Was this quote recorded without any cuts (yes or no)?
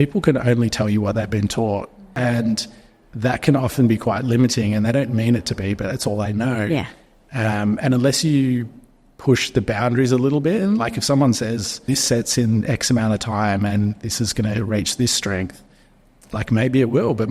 no